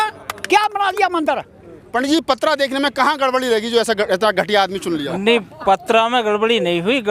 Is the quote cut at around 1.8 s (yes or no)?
yes